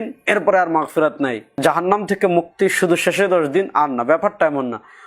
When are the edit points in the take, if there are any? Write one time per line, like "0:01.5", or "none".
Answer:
0:01.5